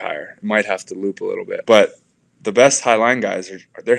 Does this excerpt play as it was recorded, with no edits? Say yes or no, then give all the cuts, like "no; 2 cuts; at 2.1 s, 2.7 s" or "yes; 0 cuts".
no; 1 cut; at 1.6 s